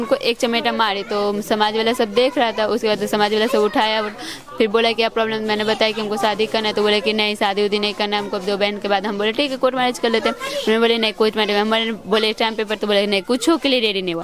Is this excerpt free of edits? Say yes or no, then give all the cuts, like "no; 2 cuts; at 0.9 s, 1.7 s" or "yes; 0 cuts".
yes; 0 cuts